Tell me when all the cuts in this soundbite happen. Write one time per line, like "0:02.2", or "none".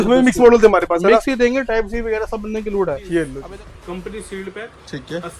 0:03.4

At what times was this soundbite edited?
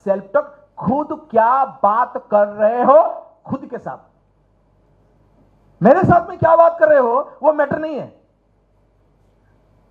none

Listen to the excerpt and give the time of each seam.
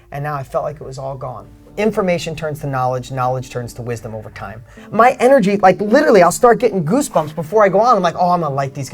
0:01.7
0:04.8

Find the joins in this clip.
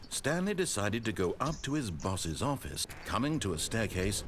0:03.0

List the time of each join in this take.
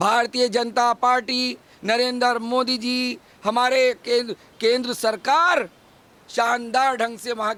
none

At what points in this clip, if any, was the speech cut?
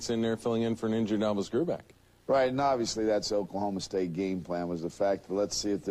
0:02.6

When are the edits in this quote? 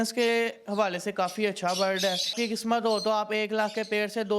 0:02.3

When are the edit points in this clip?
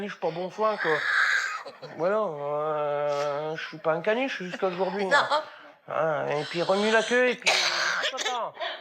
none

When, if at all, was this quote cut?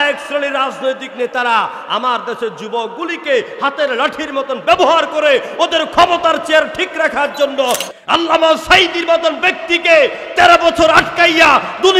0:07.8

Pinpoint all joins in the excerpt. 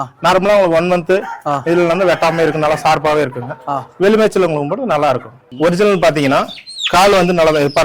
0:05.4

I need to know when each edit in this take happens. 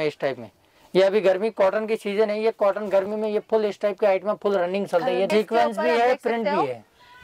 0:05.3

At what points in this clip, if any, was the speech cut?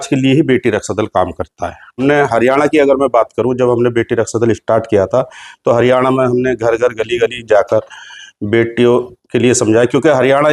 0:02.0

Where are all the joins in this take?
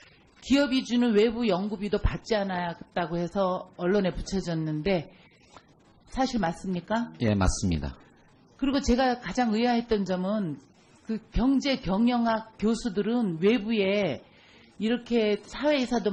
none

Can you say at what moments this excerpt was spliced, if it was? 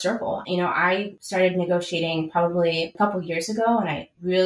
0:01.2
0:02.9

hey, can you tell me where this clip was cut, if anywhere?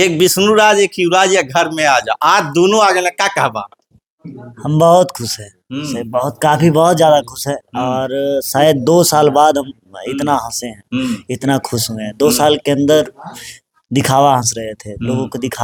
none

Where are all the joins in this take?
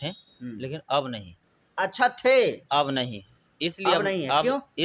none

